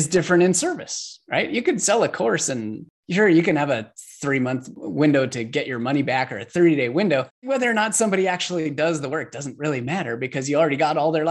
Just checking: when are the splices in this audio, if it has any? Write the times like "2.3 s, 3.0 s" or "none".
4.8 s, 7.3 s